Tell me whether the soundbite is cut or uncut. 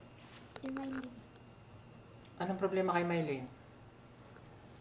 uncut